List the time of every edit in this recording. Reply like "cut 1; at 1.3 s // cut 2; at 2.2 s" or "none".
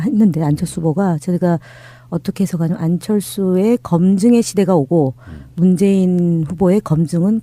cut 1; at 2.8 s